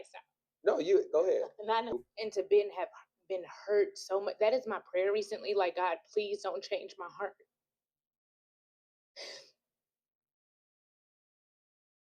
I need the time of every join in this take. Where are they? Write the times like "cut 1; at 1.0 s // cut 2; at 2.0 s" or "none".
cut 1; at 1.9 s

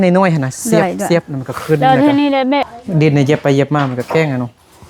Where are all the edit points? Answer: cut 1; at 2.6 s

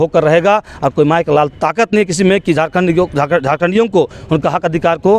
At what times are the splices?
none

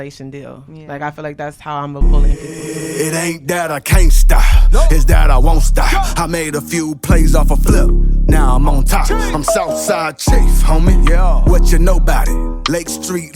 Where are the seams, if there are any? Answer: cut 1; at 2.0 s

